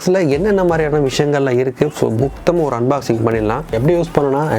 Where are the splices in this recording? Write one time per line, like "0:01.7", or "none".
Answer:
0:03.6

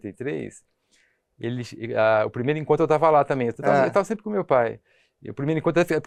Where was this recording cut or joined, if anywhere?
none

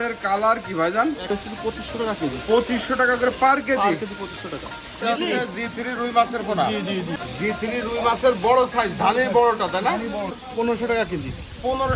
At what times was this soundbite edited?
0:01.3
0:05.0
0:07.2
0:10.4

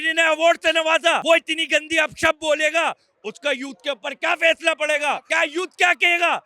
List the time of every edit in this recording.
0:01.2
0:05.2

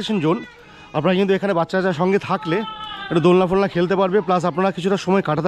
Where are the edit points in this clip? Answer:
none

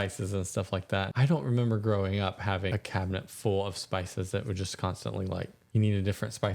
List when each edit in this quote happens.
0:01.1
0:02.7
0:05.6

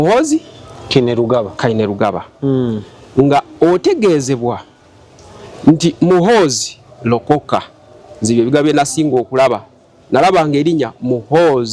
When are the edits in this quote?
none

